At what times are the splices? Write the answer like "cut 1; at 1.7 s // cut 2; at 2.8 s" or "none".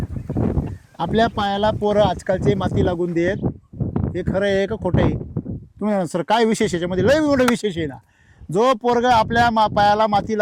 none